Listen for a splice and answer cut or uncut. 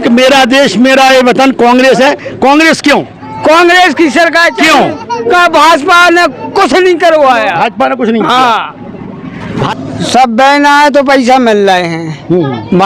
cut